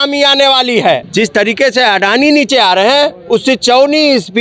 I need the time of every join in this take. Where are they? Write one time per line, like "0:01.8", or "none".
0:01.1